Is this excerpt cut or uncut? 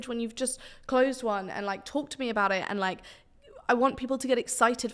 uncut